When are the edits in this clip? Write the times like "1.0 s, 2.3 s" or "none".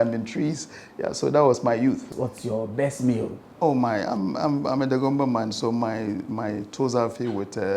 2.1 s